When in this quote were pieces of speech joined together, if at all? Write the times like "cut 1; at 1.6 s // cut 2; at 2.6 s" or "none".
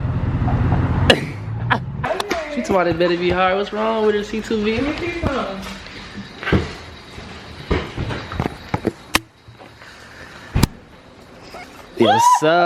cut 1; at 2.0 s